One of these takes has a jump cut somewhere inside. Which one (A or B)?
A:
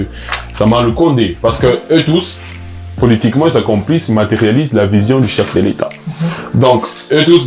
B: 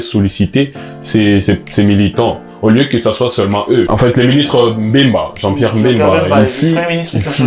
B